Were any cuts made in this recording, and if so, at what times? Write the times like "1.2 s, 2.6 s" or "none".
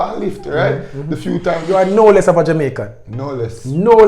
1.6 s

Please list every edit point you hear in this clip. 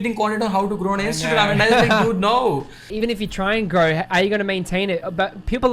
2.9 s

